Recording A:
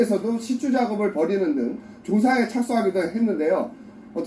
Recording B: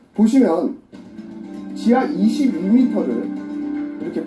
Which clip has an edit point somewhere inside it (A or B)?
B